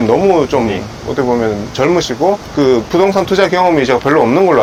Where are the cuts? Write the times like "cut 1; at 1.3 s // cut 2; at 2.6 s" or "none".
none